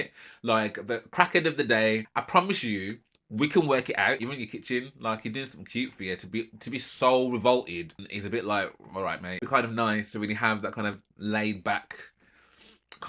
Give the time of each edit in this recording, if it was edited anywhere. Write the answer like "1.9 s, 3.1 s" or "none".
2.1 s, 4.2 s, 8.1 s, 9.3 s